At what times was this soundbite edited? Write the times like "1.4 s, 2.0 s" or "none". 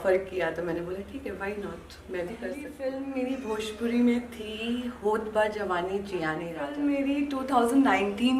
2.7 s, 6.6 s